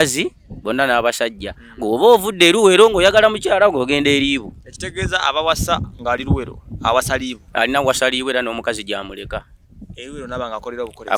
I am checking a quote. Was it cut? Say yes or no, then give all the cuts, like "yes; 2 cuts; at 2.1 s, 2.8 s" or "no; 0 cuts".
no; 0 cuts